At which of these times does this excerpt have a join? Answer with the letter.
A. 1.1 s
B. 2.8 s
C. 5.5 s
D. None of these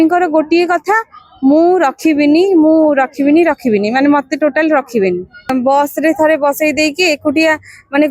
C